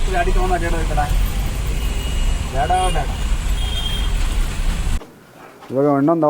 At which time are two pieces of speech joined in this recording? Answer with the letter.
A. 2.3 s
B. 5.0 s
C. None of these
B